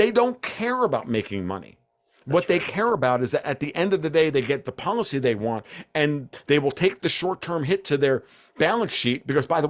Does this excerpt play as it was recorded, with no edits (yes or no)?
yes